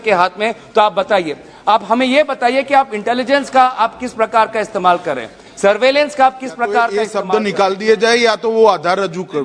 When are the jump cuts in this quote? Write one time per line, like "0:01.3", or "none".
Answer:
0:07.1